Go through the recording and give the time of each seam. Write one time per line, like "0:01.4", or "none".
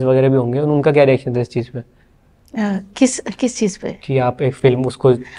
none